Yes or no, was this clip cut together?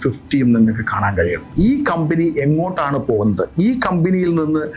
yes